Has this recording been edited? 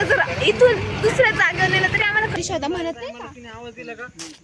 yes; 1 cut; at 2.3 s

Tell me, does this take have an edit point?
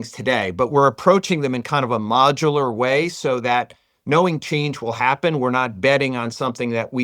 no; 0 cuts

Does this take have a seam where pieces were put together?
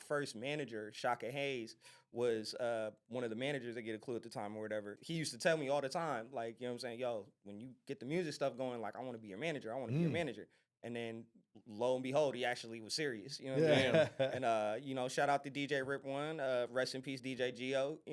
yes; 1 cut; at 5.0 s

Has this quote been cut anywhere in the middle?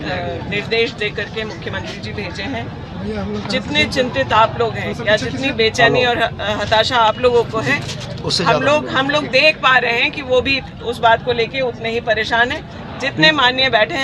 no; 0 cuts

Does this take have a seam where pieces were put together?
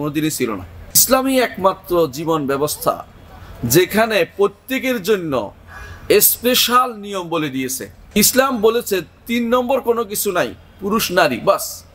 yes; 2 cuts; at 1.0 s, 8.2 s

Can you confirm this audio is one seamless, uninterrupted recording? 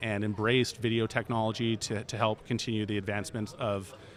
yes; 0 cuts

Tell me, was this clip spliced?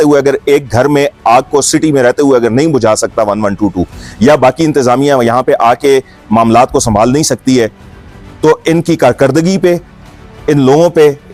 no; 0 cuts

